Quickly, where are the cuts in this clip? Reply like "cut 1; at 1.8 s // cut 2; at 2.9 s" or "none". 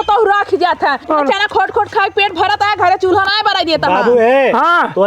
cut 1; at 1.1 s